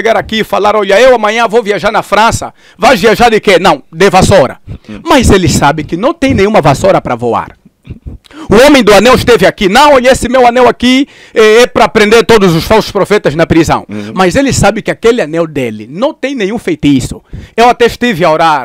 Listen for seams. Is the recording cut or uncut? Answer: uncut